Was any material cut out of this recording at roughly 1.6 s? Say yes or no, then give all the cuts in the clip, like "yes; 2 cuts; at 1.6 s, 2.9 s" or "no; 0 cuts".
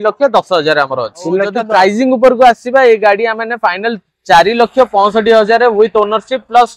yes; 1 cut; at 1.6 s